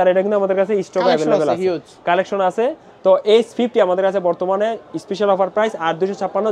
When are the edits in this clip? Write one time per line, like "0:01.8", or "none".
none